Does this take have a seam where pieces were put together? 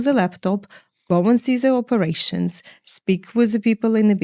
no; 0 cuts

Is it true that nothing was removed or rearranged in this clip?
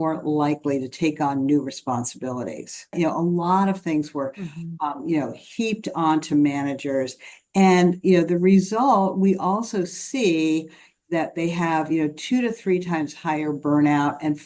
no; 1 cut; at 2.9 s

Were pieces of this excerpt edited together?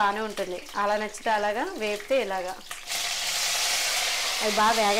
yes; 1 cut; at 2.9 s

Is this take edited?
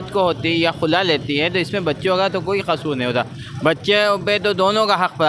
no; 0 cuts

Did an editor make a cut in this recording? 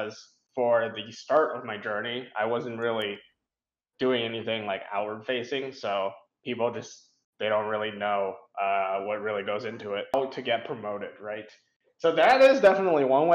yes; 1 cut; at 10.1 s

